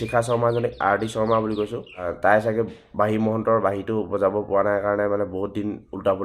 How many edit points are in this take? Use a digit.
1